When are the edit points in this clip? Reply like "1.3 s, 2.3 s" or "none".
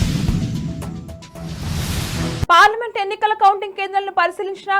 2.5 s

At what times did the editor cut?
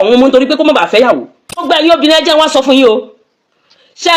1.6 s

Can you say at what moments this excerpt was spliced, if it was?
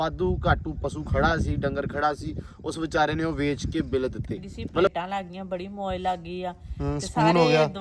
4.9 s

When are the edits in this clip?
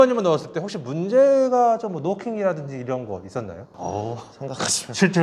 3.6 s

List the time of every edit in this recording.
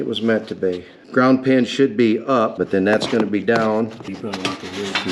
0.9 s, 2.5 s, 4.1 s

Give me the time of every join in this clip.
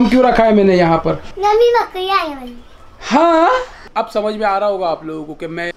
1.2 s, 3.9 s

